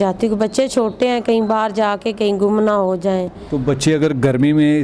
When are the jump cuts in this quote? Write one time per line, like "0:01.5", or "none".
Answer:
none